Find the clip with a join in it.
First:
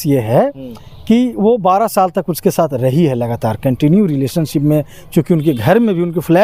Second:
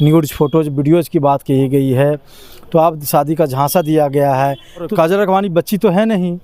second; 1 cut; at 4.9 s

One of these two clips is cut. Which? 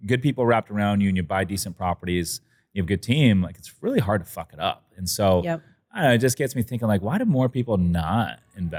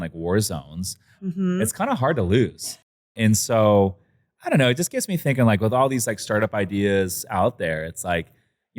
second; 1 cut; at 1.2 s

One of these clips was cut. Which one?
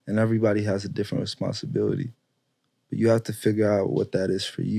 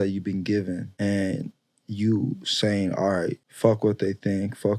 second; 2 cuts; at 0.9 s, 3.5 s

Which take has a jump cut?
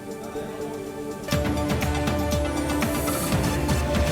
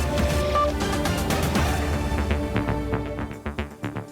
second; 1 cut; at 3.2 s

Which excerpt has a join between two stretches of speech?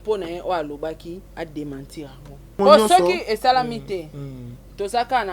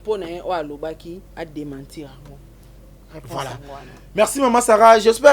first; 1 cut; at 2.6 s

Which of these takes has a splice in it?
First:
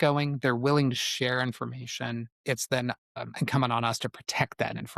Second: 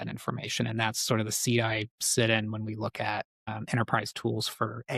first; 2 cuts; at 2.3 s, 3.1 s

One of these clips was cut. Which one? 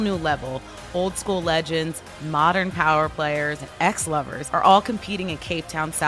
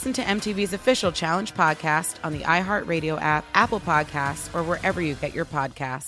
first; 2 cuts; at 3.7 s, 4.4 s

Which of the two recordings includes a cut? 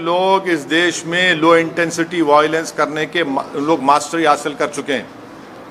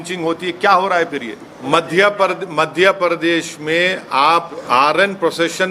second; 2 cuts; at 1.6 s, 4.6 s

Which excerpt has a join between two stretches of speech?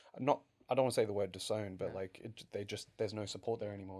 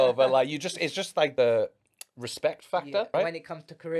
second; 2 cuts; at 1.3 s, 3.1 s

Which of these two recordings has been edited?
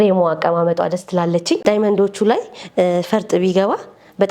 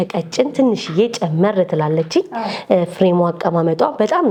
first; 1 cut; at 1.6 s

